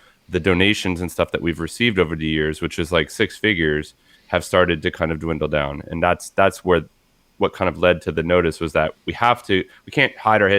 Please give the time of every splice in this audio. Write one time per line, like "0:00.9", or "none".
none